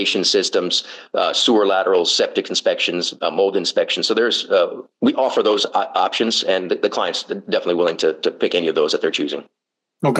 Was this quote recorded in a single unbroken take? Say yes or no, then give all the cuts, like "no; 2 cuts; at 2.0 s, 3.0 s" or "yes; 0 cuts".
yes; 0 cuts